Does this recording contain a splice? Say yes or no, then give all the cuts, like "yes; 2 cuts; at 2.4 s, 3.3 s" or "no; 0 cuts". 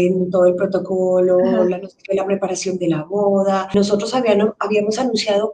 yes; 1 cut; at 3.7 s